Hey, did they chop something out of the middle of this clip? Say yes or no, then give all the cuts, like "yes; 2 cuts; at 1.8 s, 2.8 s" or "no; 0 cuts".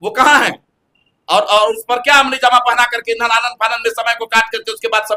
no; 0 cuts